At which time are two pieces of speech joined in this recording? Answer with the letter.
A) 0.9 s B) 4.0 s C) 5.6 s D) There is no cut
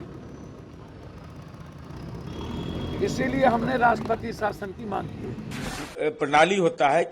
C